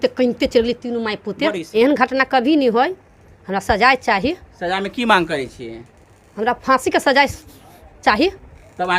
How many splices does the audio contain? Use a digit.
1